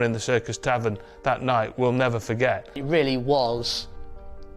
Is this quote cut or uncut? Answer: cut